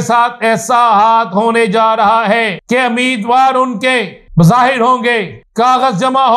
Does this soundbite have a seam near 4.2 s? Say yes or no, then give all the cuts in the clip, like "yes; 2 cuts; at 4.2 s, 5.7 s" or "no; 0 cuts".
yes; 3 cuts; at 2.6 s, 4.2 s, 5.4 s